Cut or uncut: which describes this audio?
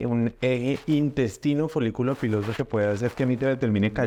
uncut